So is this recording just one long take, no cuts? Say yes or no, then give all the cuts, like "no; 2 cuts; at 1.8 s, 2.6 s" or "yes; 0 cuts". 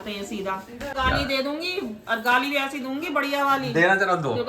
no; 1 cut; at 0.9 s